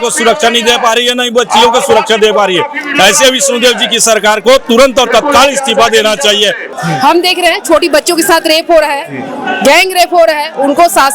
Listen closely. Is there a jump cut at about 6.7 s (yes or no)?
yes